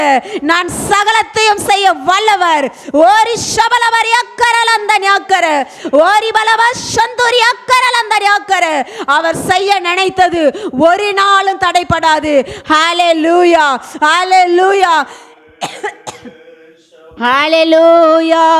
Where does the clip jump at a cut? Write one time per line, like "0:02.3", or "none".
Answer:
none